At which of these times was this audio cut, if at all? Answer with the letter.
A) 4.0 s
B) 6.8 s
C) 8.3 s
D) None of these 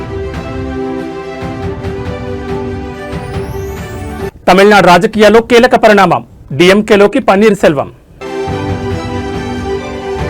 A